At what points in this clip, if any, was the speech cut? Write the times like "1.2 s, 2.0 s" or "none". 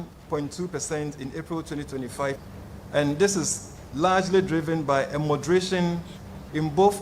2.4 s